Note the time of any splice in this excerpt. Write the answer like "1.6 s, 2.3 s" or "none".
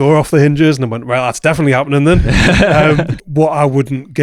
3.1 s